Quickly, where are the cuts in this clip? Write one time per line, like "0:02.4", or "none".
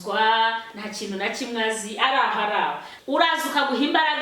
0:02.9